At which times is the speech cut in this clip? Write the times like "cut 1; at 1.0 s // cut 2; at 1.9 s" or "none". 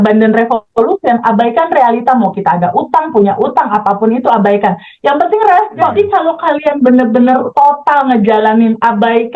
cut 1; at 5.9 s